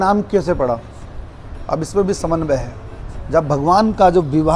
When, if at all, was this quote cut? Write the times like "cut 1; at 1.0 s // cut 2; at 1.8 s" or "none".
none